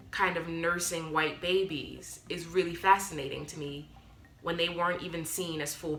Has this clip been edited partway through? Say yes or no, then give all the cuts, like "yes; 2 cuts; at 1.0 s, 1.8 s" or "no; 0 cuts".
no; 0 cuts